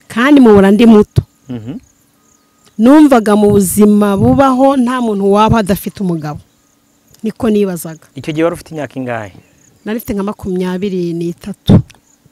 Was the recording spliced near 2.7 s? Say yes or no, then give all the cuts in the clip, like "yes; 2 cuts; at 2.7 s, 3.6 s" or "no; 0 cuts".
no; 0 cuts